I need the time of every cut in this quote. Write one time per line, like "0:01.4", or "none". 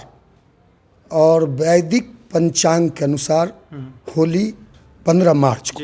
none